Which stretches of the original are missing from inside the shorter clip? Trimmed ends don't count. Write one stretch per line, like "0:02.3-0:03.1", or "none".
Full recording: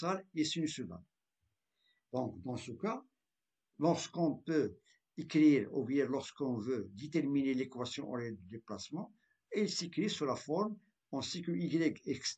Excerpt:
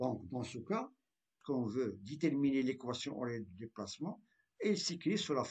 0:03.5-0:06.3